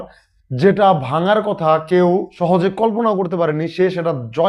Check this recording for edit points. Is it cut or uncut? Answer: cut